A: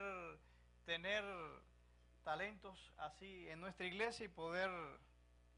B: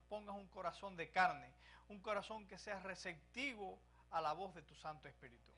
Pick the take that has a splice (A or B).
B